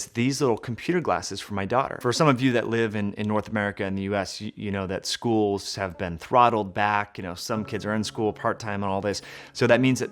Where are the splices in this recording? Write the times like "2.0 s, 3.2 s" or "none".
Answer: 1.9 s